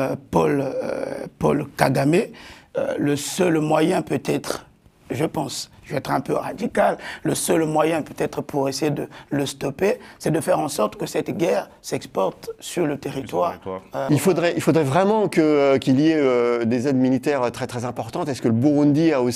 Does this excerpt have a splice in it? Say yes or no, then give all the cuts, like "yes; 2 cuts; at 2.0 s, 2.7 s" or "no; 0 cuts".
yes; 1 cut; at 14.0 s